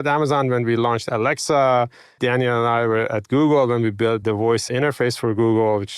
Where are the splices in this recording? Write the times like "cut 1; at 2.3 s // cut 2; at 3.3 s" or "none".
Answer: cut 1; at 1.0 s // cut 2; at 2.1 s // cut 3; at 4.4 s